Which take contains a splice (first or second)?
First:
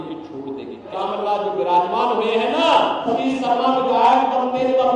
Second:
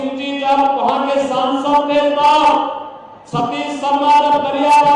first